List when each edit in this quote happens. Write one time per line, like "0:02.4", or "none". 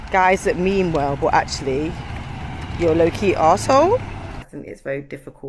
0:04.4